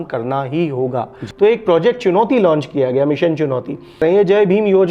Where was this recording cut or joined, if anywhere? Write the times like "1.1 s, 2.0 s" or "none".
1.2 s, 3.9 s

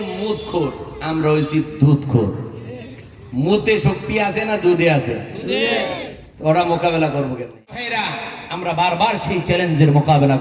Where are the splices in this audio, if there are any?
7.9 s

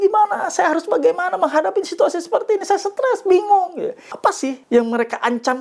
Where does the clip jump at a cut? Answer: 4.3 s

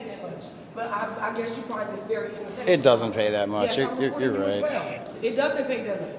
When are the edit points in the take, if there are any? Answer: 5.1 s

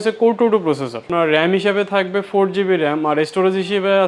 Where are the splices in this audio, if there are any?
1.1 s

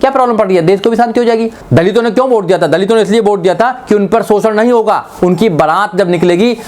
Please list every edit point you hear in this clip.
1.6 s

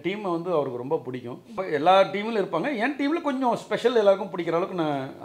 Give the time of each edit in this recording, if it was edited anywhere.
1.6 s

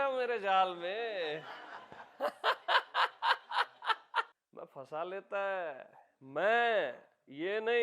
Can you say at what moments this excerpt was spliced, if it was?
4.3 s

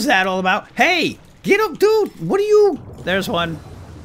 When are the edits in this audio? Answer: 2.8 s

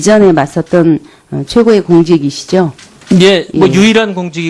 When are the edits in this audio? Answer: none

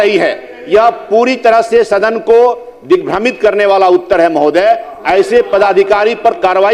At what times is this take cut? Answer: none

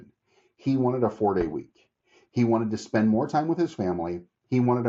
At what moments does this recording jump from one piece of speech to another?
none

